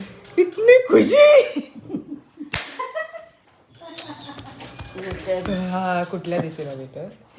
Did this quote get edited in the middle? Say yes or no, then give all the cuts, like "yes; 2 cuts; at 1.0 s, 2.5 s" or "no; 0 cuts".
no; 0 cuts